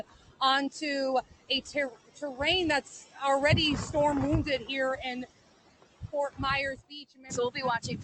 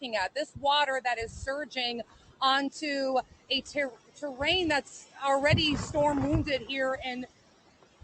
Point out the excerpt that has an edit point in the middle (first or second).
first